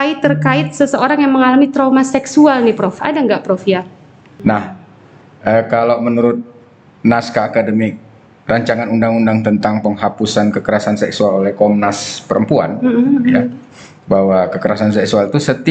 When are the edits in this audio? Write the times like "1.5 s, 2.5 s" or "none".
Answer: 4.2 s